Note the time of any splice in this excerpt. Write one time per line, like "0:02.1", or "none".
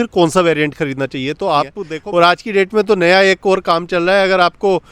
0:01.8